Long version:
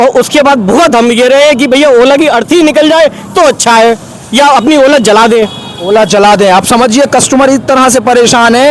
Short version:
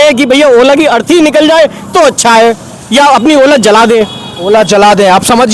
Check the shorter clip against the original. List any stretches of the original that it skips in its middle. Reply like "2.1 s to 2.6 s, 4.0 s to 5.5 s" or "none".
none